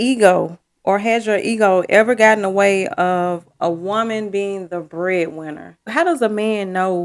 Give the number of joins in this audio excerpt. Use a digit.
1